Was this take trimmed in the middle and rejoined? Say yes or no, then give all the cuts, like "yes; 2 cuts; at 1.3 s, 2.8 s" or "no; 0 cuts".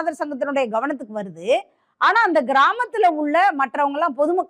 no; 0 cuts